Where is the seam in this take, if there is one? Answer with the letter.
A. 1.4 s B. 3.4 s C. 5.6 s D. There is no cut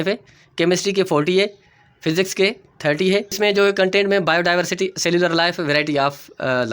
B